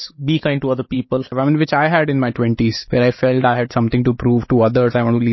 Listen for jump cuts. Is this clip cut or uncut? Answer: cut